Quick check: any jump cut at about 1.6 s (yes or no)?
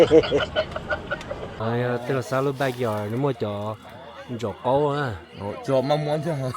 yes